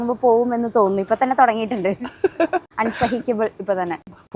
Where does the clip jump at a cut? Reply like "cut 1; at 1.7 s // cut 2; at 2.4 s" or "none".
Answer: cut 1; at 2.7 s